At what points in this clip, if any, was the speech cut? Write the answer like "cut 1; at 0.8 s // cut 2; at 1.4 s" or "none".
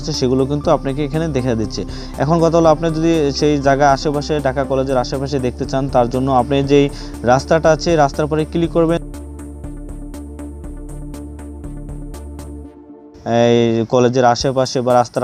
none

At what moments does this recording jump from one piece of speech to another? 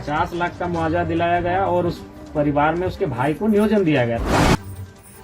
cut 1; at 4.2 s

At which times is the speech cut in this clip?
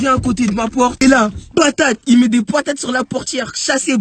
cut 1; at 1.0 s

